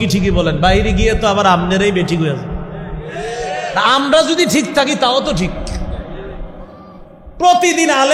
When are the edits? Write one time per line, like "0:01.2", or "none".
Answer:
none